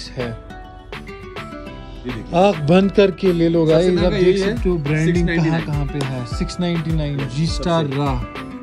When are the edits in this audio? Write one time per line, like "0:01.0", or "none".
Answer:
none